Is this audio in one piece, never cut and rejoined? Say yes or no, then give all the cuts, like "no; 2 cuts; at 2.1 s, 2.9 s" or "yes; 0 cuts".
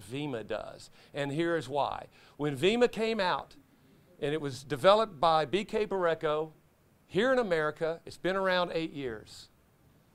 yes; 0 cuts